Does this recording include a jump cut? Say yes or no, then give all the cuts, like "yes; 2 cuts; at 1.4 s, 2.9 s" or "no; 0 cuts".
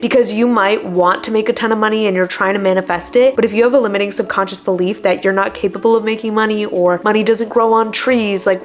no; 0 cuts